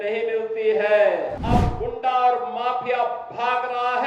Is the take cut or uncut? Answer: cut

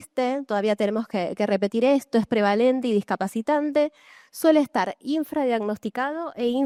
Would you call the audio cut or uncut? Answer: uncut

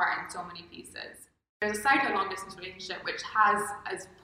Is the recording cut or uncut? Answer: cut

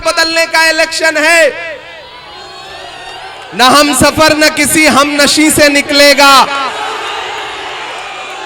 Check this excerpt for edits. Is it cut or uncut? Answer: cut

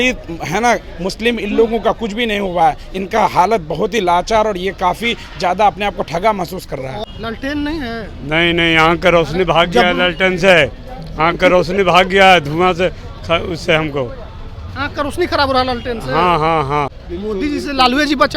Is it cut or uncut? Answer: cut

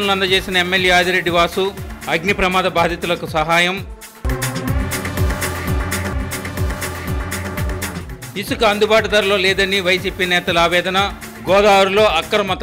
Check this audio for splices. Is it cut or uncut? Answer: uncut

